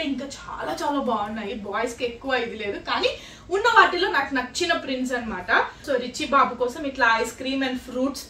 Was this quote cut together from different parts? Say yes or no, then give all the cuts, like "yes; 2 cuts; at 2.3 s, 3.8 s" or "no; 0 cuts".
no; 0 cuts